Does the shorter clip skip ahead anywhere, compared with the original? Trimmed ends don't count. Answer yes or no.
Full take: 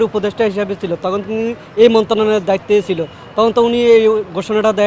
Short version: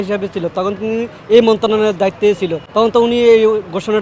yes